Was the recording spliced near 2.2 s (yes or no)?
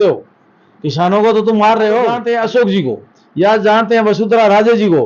yes